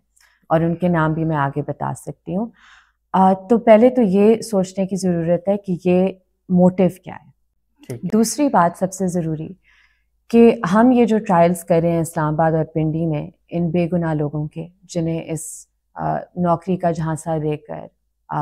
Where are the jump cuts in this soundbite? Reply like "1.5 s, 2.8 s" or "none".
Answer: none